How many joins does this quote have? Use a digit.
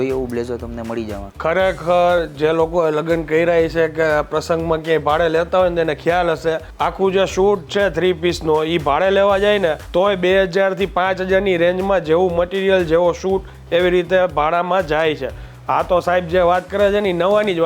3